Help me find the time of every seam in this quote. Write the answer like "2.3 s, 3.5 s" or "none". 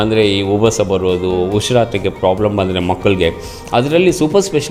none